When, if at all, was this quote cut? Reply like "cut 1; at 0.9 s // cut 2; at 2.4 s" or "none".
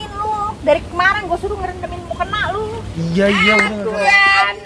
cut 1; at 3.7 s